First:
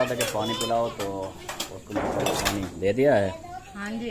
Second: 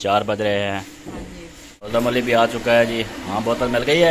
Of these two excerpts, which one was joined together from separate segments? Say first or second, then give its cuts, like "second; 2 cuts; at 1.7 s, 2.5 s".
second; 1 cut; at 1.7 s